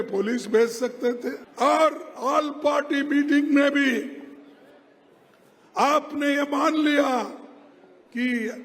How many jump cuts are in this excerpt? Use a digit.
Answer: 1